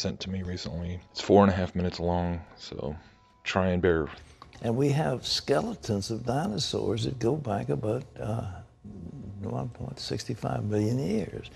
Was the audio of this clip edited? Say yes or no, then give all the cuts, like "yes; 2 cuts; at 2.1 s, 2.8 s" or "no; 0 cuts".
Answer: no; 0 cuts